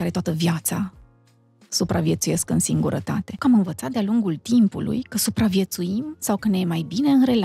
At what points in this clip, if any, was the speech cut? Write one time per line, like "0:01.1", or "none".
0:03.4